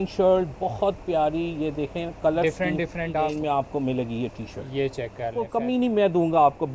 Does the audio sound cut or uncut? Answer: cut